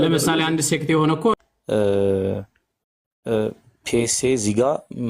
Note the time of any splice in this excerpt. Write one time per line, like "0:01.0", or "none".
0:01.3